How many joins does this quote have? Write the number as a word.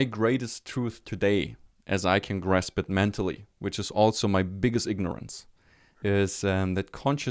one